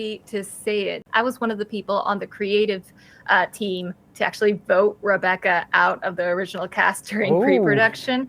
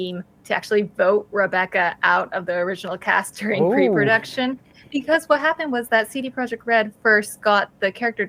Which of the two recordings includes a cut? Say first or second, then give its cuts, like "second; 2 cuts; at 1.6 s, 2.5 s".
first; 1 cut; at 1.0 s